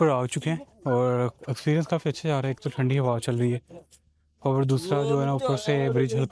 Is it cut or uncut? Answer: uncut